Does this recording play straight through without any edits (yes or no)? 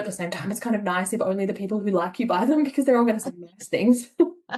yes